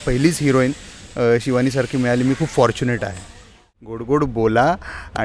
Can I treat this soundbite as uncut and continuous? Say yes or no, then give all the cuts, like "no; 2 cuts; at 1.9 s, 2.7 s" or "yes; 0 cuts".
no; 1 cut; at 3.6 s